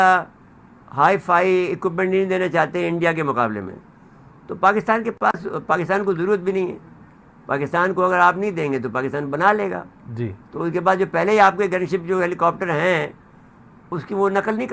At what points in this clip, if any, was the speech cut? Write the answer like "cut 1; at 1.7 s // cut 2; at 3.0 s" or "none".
none

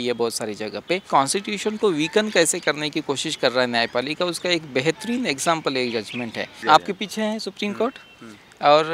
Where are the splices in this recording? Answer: cut 1; at 1.0 s // cut 2; at 6.5 s

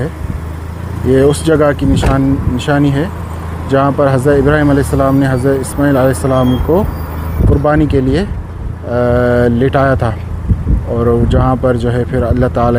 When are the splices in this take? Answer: none

